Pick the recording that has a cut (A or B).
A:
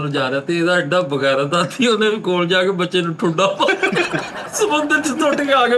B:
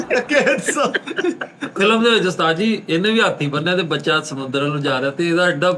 B